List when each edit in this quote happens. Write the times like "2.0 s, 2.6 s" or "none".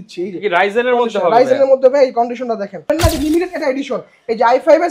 2.9 s